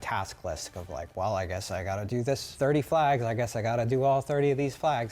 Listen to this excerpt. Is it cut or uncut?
cut